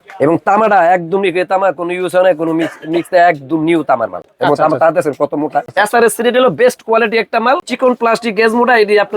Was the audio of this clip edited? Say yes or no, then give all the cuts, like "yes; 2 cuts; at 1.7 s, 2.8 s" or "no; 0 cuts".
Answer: yes; 2 cuts; at 5.7 s, 7.7 s